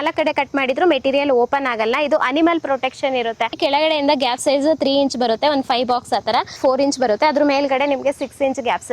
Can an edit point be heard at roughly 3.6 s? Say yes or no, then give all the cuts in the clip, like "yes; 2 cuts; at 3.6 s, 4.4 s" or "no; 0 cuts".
yes; 2 cuts; at 3.6 s, 6.6 s